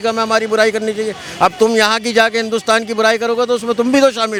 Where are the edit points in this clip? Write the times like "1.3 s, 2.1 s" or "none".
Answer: none